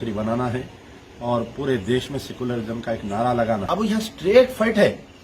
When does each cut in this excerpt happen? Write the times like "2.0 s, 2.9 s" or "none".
3.7 s